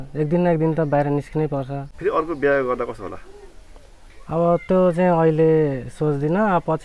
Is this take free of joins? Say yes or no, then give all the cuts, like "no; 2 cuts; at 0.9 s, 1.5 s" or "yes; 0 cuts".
no; 1 cut; at 1.8 s